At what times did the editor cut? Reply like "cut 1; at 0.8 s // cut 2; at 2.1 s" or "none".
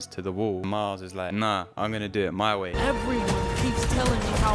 cut 1; at 1.0 s // cut 2; at 2.7 s